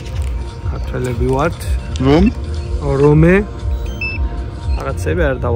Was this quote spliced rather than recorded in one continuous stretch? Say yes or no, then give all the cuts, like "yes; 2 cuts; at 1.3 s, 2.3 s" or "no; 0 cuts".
no; 0 cuts